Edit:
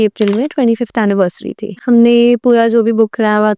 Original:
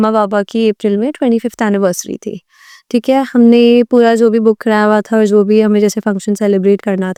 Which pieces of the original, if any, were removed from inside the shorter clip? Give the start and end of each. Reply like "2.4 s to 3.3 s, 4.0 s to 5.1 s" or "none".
2.4 s to 3.3 s